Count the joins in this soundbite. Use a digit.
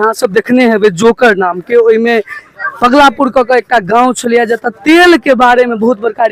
0